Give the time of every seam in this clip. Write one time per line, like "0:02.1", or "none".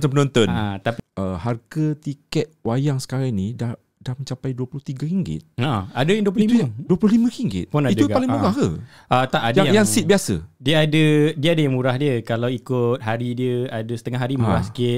0:00.9